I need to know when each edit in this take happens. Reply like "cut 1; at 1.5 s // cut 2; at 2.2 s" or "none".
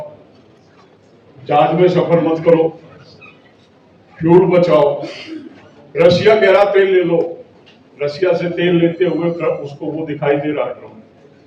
none